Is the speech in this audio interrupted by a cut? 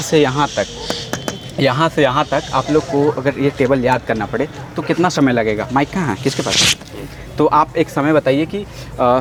no; 0 cuts

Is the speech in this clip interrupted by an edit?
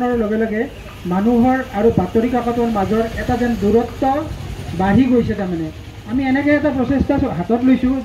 no; 0 cuts

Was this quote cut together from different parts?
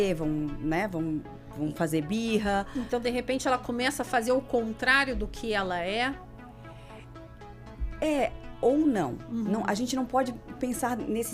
no; 0 cuts

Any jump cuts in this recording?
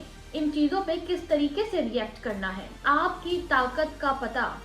yes; 1 cut; at 2.7 s

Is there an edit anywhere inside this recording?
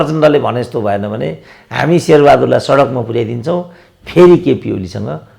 no; 0 cuts

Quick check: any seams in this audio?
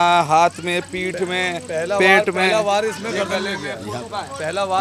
no; 0 cuts

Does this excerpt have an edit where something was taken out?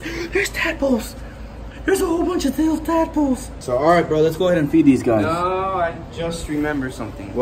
yes; 1 cut; at 3.5 s

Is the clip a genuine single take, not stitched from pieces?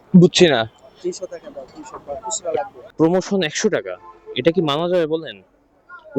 no; 1 cut; at 2.8 s

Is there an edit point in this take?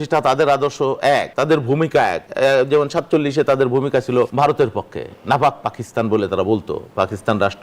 yes; 3 cuts; at 1.3 s, 2.2 s, 4.3 s

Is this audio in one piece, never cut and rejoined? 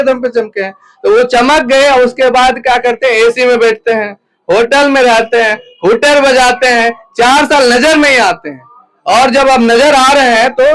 yes; 0 cuts

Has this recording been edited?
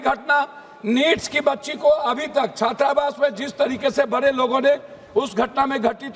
no; 0 cuts

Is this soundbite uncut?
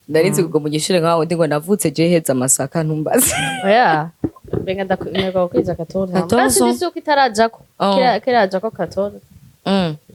yes; 0 cuts

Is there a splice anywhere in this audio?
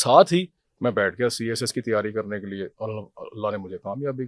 no; 0 cuts

